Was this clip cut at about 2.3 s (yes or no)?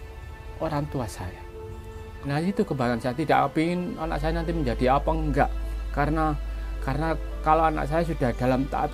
yes